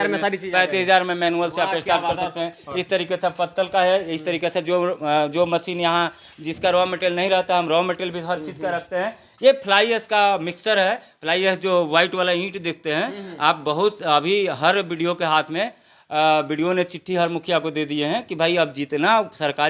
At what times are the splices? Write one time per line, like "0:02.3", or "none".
none